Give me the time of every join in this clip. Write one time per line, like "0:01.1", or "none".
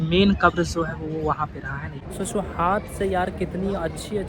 0:01.9

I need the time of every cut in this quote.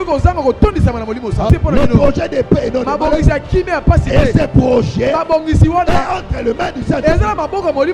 0:01.5

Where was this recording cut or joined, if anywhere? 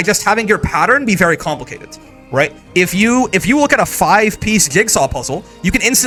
none

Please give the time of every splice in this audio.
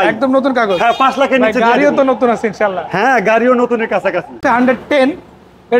0:04.4

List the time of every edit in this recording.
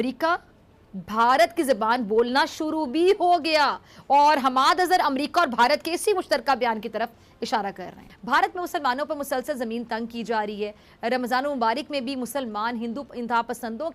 0:08.1

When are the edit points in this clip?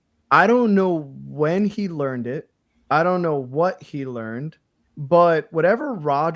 none

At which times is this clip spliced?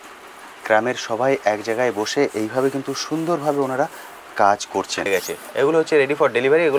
0:05.1

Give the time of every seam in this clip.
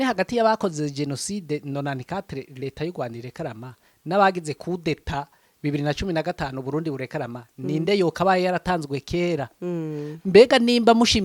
none

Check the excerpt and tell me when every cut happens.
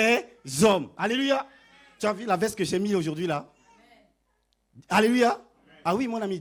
none

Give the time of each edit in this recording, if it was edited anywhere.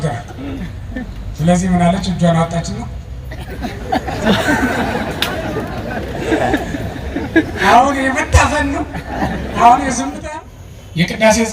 0:10.2

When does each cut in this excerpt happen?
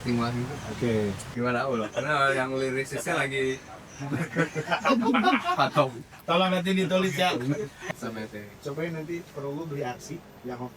0:01.2
0:07.9

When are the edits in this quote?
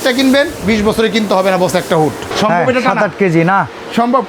0:02.3

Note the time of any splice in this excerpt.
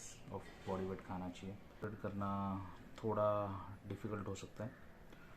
0:01.8

